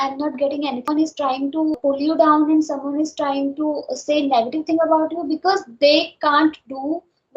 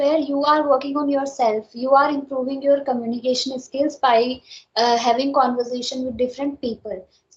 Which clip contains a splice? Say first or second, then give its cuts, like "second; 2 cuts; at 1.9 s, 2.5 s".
first; 2 cuts; at 0.8 s, 1.8 s